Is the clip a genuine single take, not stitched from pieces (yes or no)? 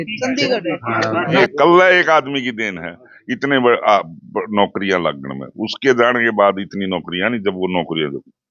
no